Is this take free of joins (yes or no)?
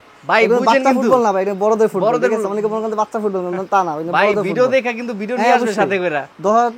yes